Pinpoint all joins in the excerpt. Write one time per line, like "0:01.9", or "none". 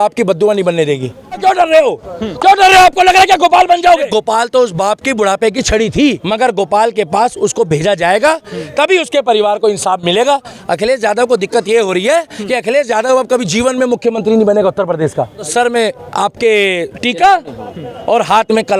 0:01.4
0:04.1
0:06.2
0:10.5
0:15.5